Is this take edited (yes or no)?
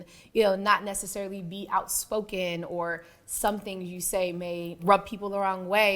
yes